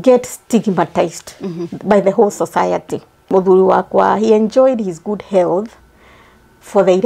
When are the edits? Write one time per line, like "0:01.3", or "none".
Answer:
0:03.3